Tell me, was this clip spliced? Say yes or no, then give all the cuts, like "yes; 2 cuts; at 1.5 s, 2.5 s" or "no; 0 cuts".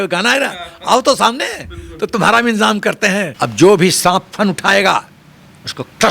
yes; 1 cut; at 3.3 s